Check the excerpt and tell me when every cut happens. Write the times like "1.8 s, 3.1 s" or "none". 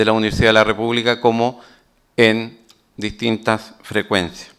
none

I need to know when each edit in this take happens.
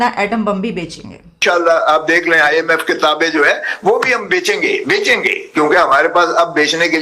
1.3 s

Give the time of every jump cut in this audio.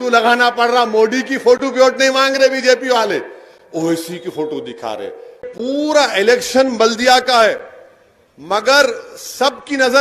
5.5 s

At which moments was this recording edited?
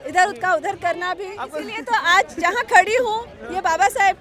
1.7 s

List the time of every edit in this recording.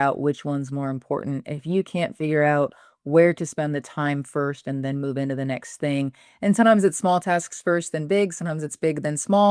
none

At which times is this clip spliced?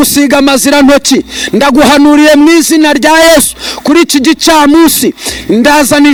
none

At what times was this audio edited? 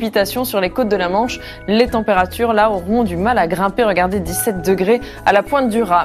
none

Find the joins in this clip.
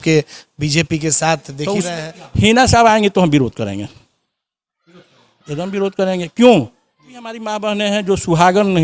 1.9 s, 7.4 s

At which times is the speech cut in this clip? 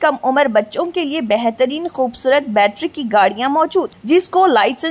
none

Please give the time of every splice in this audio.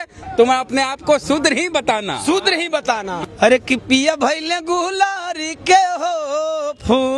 3.2 s

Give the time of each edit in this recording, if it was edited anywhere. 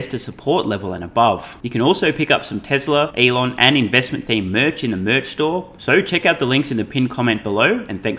1.6 s, 3.1 s, 5.7 s

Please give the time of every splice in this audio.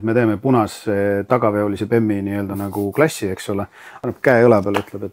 3.8 s

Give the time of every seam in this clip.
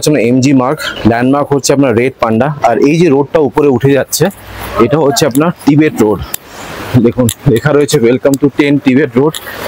none

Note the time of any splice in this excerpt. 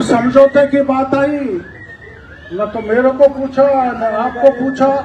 none

